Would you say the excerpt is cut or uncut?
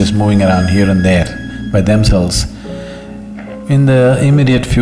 uncut